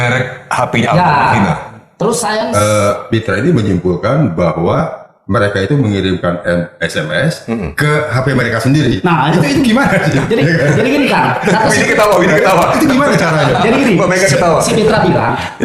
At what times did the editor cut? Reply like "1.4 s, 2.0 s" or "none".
2.5 s